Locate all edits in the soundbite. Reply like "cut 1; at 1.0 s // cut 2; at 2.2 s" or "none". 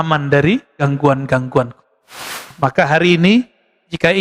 cut 1; at 2.5 s